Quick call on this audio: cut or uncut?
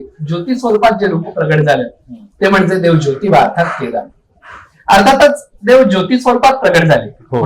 uncut